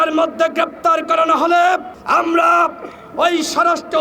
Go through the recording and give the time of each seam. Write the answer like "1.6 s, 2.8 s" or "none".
1.9 s

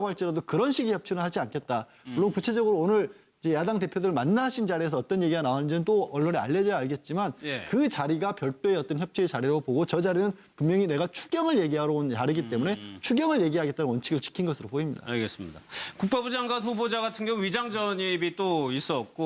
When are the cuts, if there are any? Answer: 7.0 s

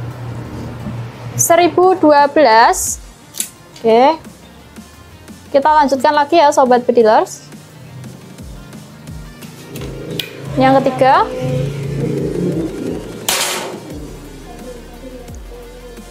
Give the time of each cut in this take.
none

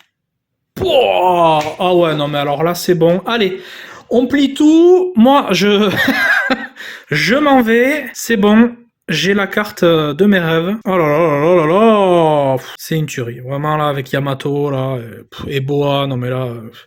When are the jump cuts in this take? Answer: 8.1 s, 10.8 s, 12.7 s

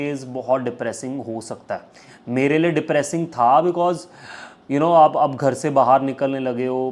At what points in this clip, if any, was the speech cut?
none

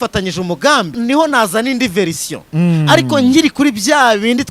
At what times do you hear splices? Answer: 0.9 s

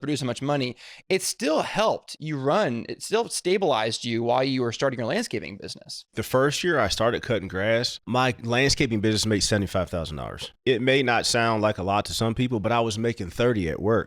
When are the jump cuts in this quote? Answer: 6.2 s, 8.1 s, 10.5 s

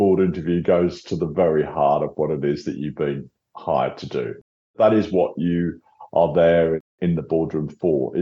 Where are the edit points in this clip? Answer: none

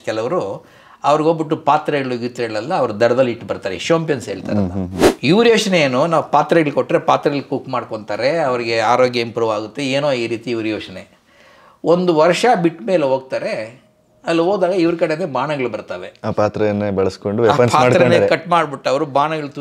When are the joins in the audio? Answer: 5.0 s

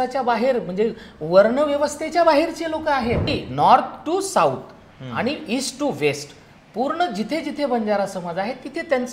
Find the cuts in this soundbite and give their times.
3.4 s

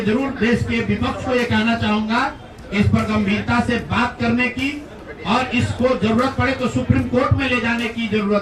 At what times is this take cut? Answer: none

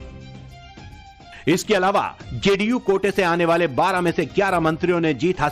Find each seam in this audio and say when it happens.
none

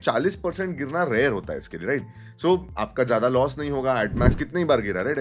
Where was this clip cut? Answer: none

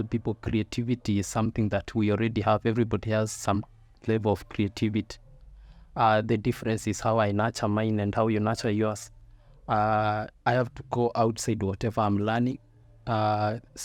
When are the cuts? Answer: none

